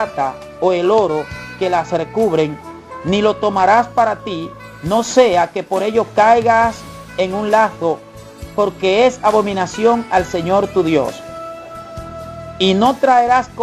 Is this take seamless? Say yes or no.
yes